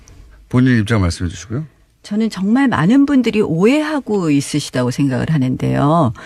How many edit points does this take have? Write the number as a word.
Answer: zero